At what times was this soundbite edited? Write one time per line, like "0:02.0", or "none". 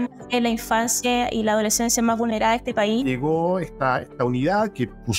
0:03.0